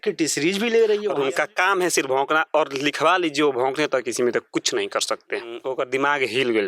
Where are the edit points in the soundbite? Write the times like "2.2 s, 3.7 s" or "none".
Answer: 1.1 s, 5.6 s